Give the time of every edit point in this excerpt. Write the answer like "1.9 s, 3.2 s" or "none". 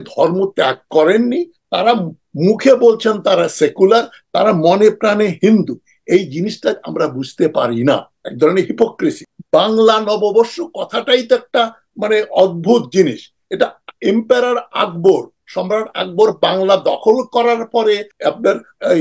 9.3 s, 18.1 s